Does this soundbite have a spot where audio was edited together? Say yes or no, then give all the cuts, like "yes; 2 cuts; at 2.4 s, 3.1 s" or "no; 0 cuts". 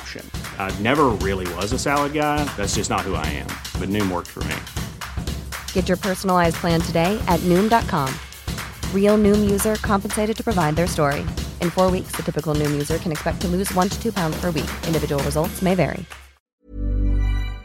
yes; 1 cut; at 16.5 s